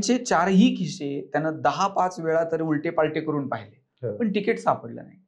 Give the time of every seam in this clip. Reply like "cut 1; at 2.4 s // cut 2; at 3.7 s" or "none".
none